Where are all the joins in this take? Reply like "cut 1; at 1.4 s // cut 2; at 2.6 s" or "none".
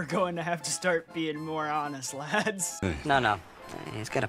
cut 1; at 2.7 s